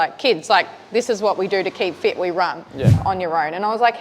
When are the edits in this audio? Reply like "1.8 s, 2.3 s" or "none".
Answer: 3.0 s

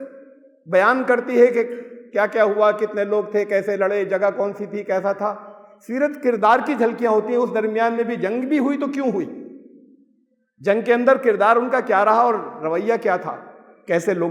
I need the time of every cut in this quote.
none

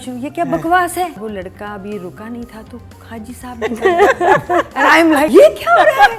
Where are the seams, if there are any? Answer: 1.2 s, 5.3 s

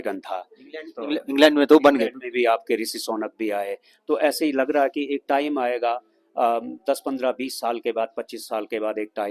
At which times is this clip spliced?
none

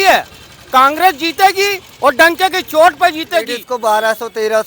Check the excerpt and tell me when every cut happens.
3.5 s

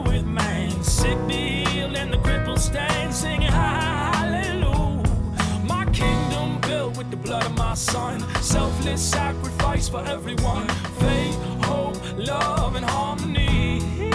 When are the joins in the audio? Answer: none

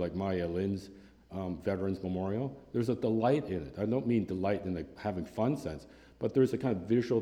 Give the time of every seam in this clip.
1.2 s

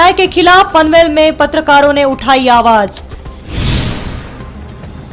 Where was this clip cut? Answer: 4.2 s

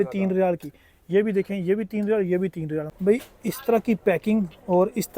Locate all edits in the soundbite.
2.9 s

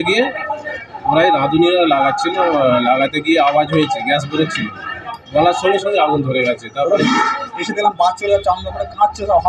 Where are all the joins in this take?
7.0 s

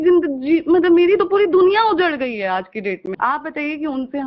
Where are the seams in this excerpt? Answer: 3.1 s

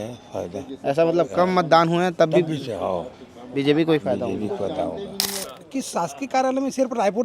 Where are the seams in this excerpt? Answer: 5.5 s

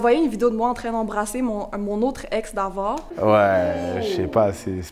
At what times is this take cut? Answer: 3.1 s

